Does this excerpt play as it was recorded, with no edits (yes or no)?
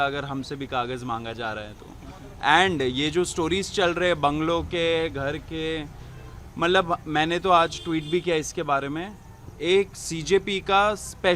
yes